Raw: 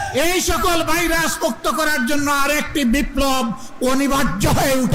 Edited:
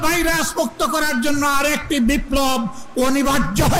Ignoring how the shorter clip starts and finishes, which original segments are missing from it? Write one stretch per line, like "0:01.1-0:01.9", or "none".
none